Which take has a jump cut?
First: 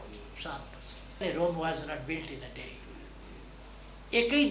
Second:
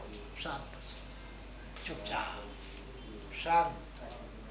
first; 1 cut; at 1.2 s

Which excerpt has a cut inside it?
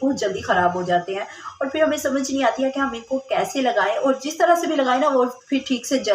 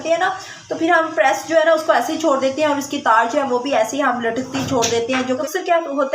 second; 1 cut; at 5.1 s

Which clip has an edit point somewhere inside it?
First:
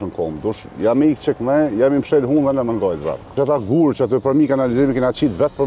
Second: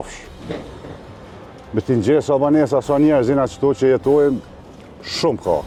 first; 1 cut; at 3.3 s

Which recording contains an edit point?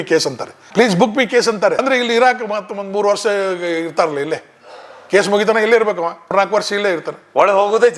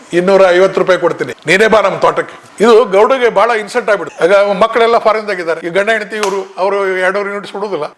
second; 2 cuts; at 4.1 s, 5.6 s

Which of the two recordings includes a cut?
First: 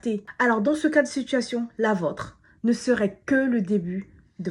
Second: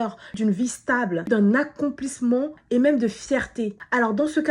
second; 2 cuts; at 1.2 s, 2.6 s

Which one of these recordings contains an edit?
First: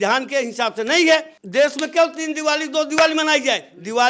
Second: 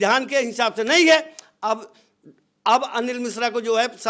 first; 1 cut; at 1.4 s

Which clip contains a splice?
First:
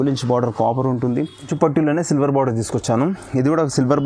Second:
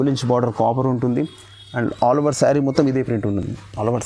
first; 1 cut; at 1.5 s

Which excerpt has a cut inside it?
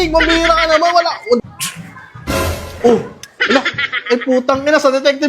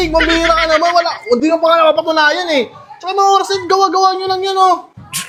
first; 1 cut; at 1.4 s

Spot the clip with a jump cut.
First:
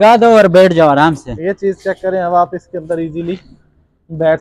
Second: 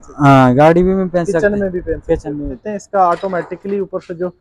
second; 1 cut; at 2.7 s

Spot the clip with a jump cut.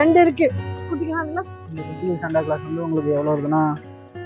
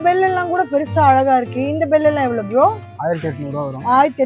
first; 1 cut; at 1.0 s

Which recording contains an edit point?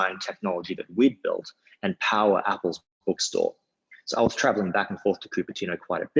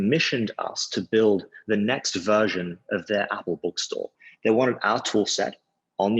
second; 1 cut; at 4.2 s

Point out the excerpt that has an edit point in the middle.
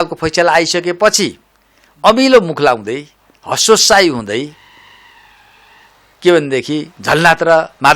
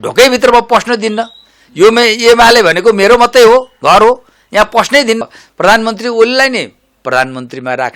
second; 1 cut; at 5.2 s

